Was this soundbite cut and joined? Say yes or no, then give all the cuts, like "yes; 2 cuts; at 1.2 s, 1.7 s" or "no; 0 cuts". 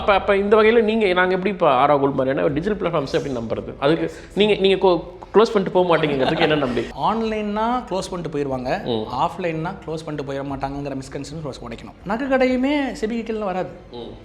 yes; 2 cuts; at 6.9 s, 11.9 s